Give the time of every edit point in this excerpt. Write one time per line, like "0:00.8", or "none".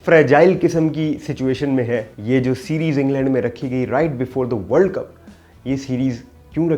0:02.1